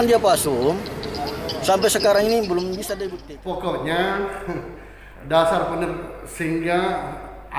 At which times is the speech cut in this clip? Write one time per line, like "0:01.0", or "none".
0:02.9